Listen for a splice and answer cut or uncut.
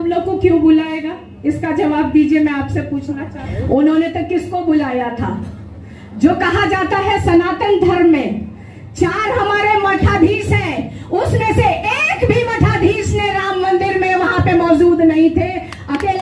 cut